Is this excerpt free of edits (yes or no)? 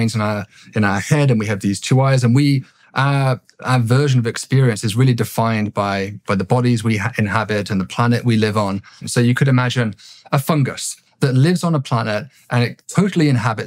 no